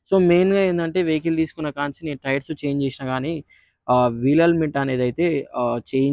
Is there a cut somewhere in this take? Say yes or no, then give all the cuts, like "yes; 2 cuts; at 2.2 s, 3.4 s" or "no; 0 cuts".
no; 0 cuts